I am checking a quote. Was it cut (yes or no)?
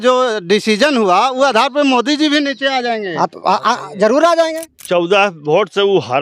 yes